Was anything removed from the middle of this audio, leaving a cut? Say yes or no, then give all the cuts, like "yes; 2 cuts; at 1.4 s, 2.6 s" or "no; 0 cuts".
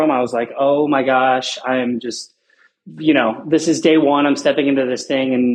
no; 0 cuts